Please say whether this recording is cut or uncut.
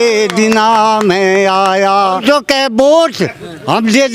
cut